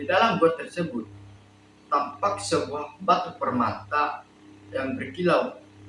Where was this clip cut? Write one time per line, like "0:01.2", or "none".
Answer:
none